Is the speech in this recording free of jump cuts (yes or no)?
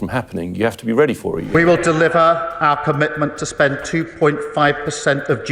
no